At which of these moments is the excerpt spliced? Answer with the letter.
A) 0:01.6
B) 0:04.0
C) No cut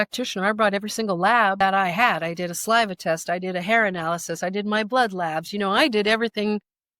A